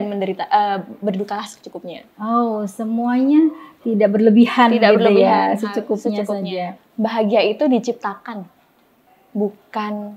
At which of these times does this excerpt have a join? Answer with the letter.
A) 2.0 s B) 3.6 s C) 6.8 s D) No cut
C